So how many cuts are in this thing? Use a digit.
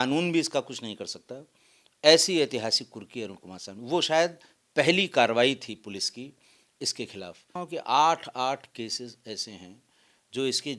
1